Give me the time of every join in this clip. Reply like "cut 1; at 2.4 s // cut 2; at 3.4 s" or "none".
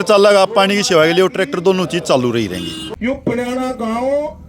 cut 1; at 3.2 s